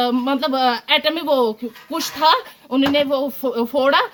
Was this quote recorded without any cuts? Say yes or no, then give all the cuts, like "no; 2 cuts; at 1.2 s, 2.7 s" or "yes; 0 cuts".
yes; 0 cuts